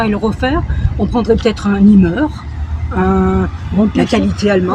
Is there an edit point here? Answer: no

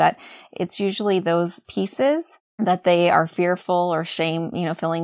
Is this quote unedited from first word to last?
no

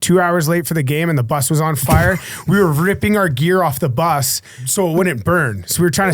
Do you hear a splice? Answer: yes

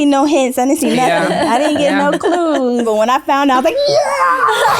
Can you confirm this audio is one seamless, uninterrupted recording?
no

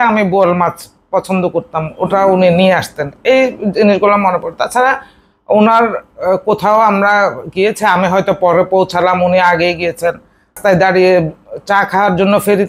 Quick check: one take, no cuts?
no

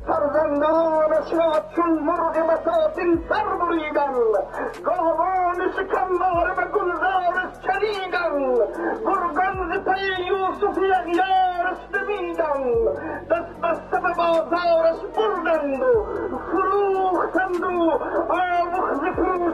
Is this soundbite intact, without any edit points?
yes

